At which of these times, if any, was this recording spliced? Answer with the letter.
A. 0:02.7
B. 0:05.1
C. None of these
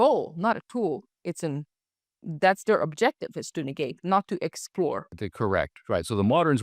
B